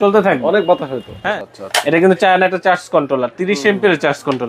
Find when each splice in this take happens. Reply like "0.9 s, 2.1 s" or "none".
1.3 s